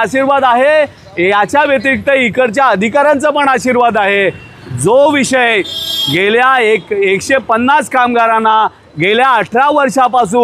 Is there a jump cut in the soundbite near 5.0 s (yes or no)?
no